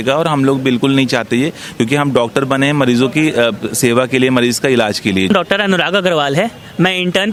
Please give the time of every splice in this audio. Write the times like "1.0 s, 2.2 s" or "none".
none